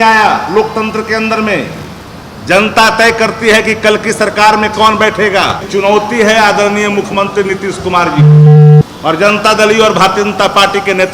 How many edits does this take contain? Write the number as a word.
two